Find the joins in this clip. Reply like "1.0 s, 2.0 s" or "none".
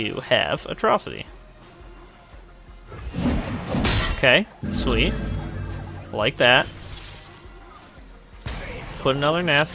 none